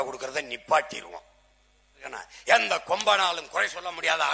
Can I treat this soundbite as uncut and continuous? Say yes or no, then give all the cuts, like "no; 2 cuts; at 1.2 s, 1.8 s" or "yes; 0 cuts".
no; 1 cut; at 2.0 s